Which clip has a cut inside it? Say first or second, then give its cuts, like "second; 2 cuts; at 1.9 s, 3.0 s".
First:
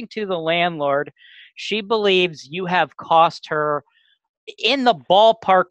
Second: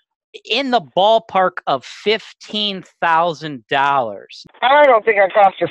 second; 1 cut; at 4.4 s